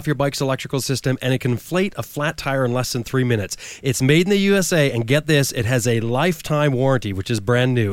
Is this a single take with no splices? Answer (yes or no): yes